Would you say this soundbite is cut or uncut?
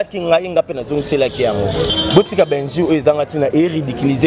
cut